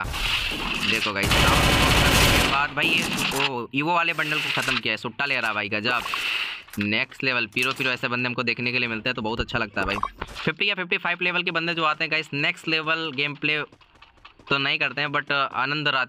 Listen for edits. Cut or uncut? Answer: uncut